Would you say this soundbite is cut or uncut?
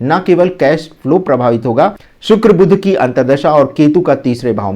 cut